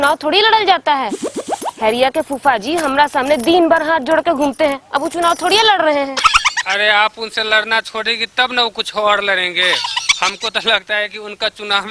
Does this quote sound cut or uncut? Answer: uncut